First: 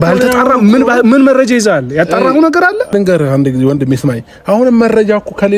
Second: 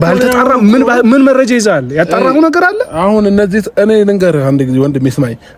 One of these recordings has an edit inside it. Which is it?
first; 1 cut; at 2.9 s

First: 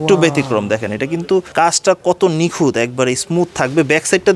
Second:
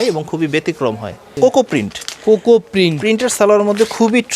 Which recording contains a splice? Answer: second; 1 cut; at 1.4 s

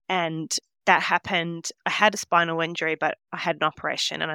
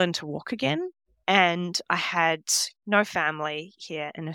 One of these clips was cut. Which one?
second; 1 cut; at 1.0 s

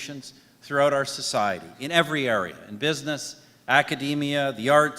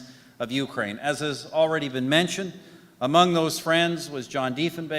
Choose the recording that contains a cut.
first; 1 cut; at 3.9 s

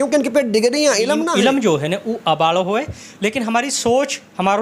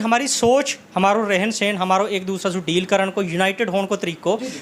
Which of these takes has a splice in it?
first; 1 cut; at 1.3 s

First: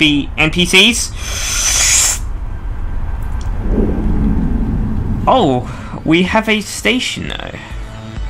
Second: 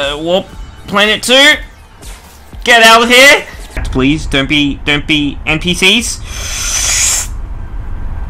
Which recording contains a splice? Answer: second; 1 cut; at 3.8 s

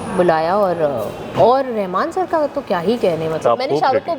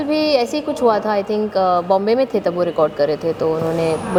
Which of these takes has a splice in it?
first; 2 cuts; at 1.2 s, 3.4 s

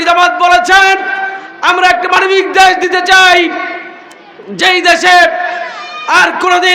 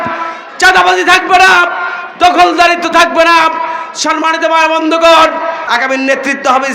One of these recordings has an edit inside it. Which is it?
second; 1 cut; at 5.6 s

